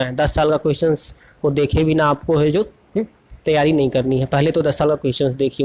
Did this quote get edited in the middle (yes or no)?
no